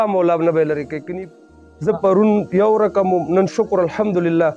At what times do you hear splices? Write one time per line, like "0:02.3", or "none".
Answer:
0:01.0